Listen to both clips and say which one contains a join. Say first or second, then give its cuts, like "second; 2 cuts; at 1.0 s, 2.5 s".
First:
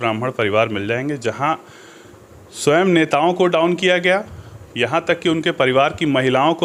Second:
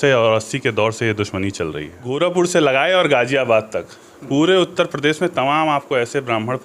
second; 1 cut; at 2.1 s